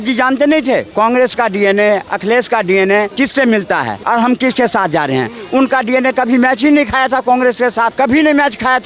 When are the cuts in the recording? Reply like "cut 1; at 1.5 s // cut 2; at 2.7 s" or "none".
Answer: cut 1; at 0.9 s // cut 2; at 2.1 s // cut 3; at 3.1 s // cut 4; at 4.0 s // cut 5; at 7.9 s